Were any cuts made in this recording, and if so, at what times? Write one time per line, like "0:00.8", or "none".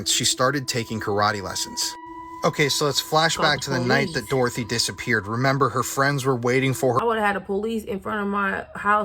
0:07.0